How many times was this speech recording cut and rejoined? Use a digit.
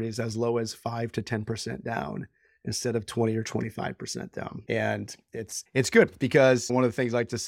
3